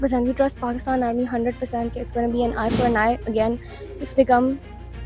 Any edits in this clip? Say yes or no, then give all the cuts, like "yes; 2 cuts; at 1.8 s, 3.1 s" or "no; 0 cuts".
no; 0 cuts